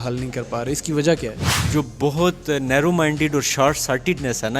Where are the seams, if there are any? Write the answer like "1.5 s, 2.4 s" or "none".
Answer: 1.6 s